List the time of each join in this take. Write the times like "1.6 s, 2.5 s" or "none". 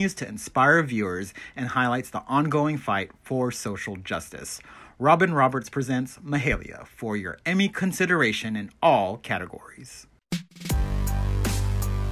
10.1 s